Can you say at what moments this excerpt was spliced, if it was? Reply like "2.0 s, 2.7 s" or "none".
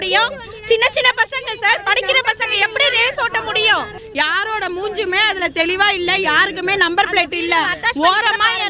4.0 s